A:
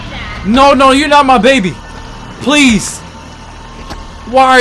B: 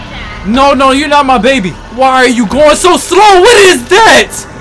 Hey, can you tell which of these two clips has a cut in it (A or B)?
B